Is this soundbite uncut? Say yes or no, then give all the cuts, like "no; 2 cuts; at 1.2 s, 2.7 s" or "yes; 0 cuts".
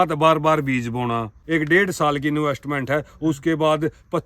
no; 1 cut; at 1.4 s